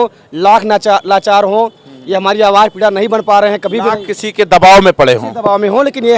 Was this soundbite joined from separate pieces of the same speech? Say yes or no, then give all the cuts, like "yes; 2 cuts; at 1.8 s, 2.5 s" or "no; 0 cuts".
no; 0 cuts